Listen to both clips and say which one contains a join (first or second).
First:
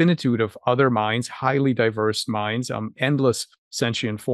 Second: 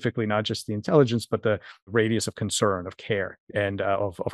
second